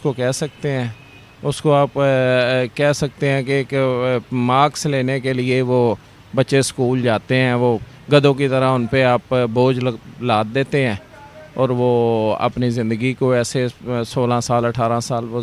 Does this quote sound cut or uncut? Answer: uncut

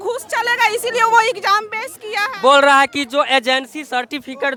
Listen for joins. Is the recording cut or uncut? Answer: uncut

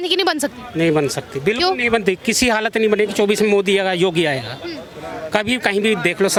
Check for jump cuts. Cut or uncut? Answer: uncut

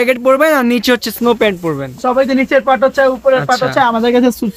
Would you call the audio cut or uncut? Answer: uncut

